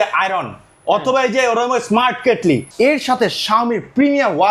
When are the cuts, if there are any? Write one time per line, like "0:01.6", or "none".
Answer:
0:02.7